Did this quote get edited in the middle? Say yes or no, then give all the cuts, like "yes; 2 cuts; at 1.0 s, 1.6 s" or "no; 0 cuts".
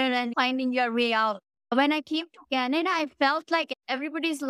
yes; 1 cut; at 1.6 s